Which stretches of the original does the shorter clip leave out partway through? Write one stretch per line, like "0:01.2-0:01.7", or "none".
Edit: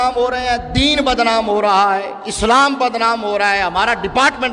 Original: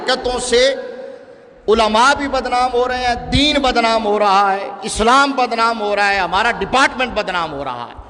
none